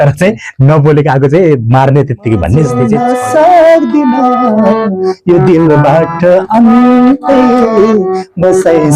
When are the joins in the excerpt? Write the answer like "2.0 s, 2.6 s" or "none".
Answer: 2.8 s